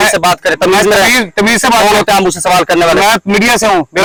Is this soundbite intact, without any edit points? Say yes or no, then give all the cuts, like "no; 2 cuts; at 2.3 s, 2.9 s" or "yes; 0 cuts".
yes; 0 cuts